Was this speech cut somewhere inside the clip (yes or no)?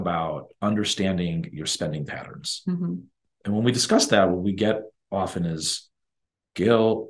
yes